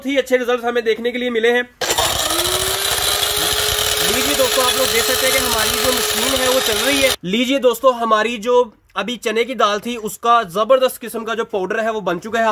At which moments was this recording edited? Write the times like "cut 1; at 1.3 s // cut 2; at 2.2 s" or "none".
cut 1; at 1.7 s // cut 2; at 7.2 s